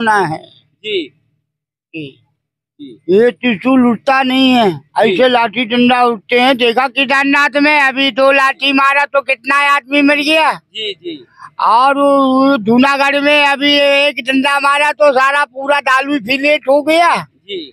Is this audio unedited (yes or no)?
yes